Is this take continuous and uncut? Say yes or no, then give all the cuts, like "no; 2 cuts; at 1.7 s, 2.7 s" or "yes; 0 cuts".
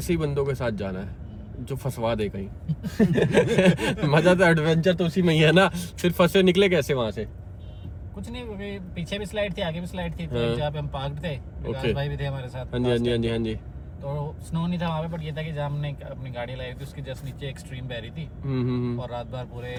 yes; 0 cuts